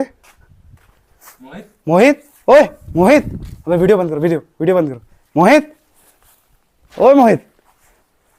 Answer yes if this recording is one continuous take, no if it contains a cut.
yes